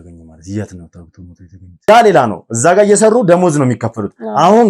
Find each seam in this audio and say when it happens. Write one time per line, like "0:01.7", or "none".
0:01.9